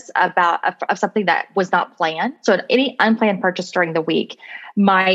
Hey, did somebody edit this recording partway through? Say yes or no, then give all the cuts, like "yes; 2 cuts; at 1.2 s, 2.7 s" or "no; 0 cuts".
yes; 1 cut; at 2.4 s